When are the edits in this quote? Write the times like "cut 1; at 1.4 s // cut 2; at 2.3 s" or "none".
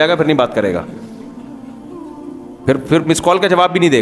cut 1; at 0.9 s // cut 2; at 2.5 s

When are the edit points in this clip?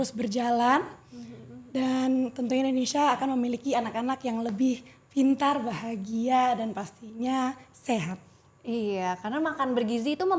none

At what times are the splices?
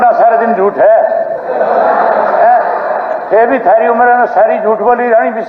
none

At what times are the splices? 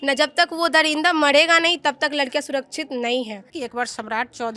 cut 1; at 3.5 s

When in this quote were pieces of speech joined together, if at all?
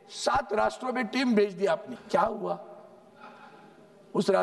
cut 1; at 1.9 s

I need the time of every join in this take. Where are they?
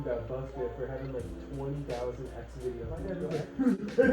cut 1; at 3.1 s

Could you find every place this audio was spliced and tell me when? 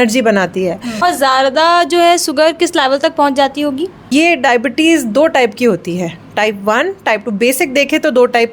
cut 1; at 1.0 s // cut 2; at 4.1 s

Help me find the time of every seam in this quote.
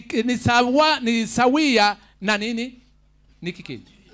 none

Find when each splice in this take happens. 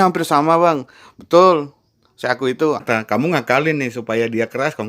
cut 1; at 2.8 s

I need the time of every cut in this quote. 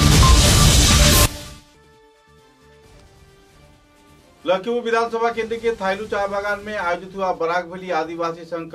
cut 1; at 1.3 s

